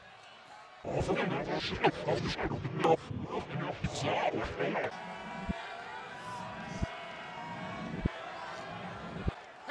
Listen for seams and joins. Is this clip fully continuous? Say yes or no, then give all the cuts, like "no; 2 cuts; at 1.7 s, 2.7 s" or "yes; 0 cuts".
yes; 0 cuts